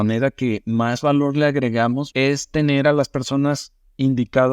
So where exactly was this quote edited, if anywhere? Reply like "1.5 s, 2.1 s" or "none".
2.0 s